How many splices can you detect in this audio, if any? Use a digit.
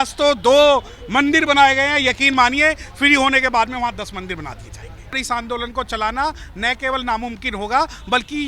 1